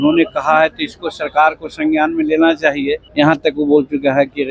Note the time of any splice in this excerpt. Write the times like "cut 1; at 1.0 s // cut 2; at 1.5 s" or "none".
cut 1; at 3.0 s